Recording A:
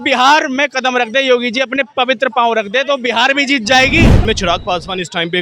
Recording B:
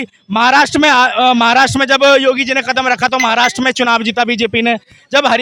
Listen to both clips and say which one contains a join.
A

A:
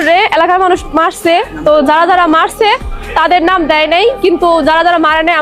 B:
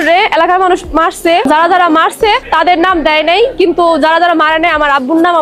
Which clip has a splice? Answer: B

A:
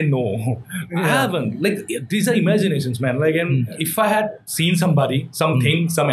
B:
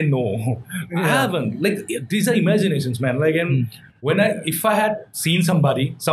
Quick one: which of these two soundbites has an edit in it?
A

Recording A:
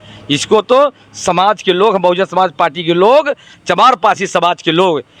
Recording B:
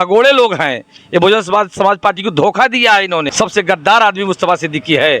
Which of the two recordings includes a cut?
B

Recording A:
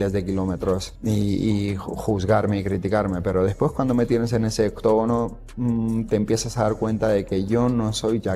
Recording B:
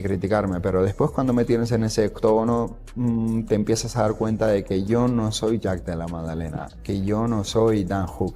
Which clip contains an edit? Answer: A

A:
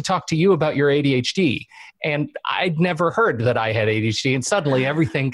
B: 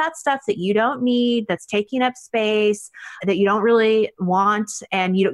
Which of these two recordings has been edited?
B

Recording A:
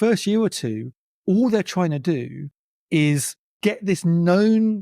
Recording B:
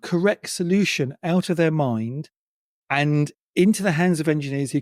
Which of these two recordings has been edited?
A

